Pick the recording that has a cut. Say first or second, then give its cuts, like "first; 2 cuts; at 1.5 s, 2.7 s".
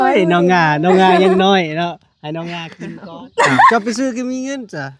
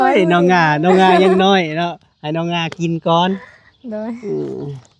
first; 1 cut; at 2.7 s